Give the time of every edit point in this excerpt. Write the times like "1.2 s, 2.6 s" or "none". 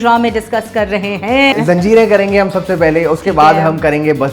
1.5 s